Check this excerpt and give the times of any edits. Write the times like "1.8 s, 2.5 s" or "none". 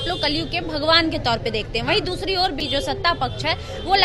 2.6 s

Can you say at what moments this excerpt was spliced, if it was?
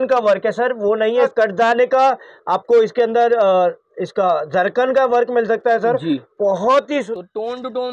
1.3 s, 7.1 s

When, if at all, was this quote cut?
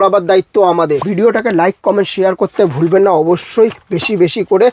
1.0 s

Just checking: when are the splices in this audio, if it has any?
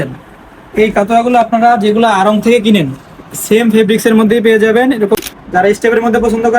5.2 s

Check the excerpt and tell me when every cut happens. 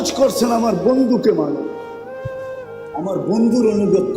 1.7 s, 2.9 s

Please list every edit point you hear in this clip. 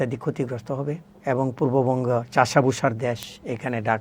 1.1 s

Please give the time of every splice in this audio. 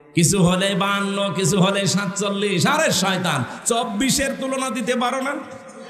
none

